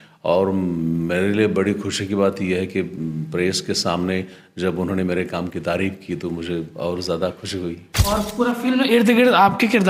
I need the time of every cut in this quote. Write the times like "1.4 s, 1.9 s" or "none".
7.9 s